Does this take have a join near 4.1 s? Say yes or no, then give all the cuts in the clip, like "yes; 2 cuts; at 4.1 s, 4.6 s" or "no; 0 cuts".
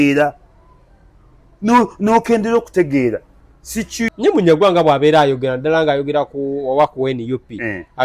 yes; 1 cut; at 4.1 s